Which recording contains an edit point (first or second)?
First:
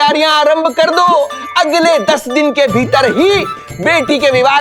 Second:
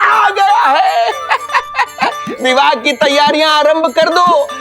second